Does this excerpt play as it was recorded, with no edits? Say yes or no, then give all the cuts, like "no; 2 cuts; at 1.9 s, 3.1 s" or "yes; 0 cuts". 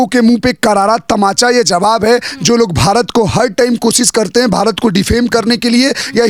yes; 0 cuts